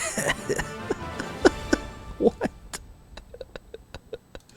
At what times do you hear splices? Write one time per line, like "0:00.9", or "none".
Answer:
none